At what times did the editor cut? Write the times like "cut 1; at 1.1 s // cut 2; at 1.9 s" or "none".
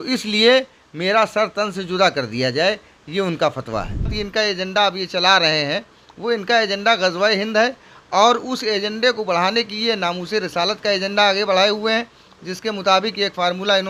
cut 1; at 4.2 s